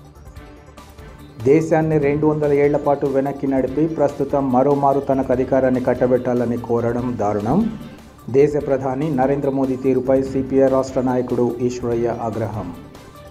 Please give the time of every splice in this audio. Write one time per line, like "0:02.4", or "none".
0:01.0